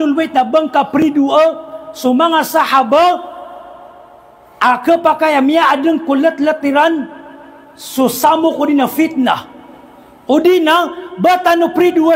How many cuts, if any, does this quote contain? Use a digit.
0